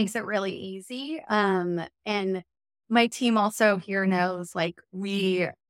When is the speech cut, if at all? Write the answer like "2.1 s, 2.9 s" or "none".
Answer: none